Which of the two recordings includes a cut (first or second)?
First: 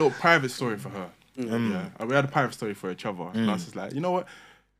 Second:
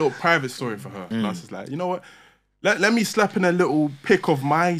second